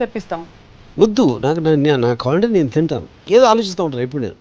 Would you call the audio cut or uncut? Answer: cut